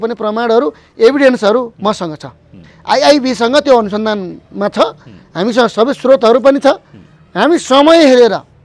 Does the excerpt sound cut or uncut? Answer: uncut